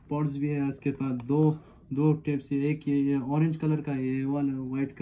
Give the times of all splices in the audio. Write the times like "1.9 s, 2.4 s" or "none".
none